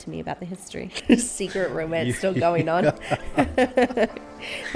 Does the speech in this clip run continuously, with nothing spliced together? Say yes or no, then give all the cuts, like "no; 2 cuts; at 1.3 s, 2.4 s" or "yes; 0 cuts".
no; 1 cut; at 1.0 s